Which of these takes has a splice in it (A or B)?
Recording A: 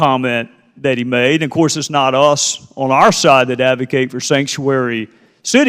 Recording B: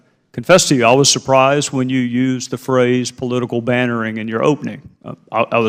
A